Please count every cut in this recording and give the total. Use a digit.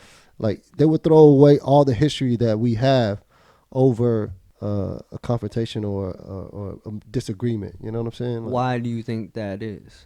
1